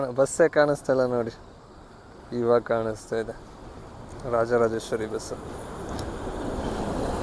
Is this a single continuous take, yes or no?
yes